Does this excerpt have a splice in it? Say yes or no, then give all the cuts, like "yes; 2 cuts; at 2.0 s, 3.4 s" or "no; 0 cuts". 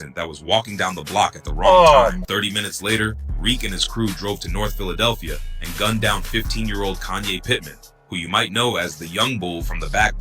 yes; 1 cut; at 2.2 s